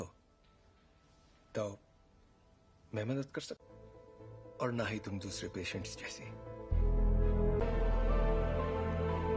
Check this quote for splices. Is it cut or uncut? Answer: cut